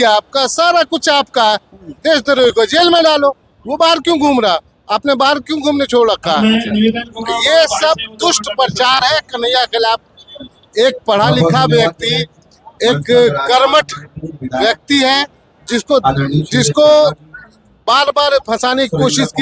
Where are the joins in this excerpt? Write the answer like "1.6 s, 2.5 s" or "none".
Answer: none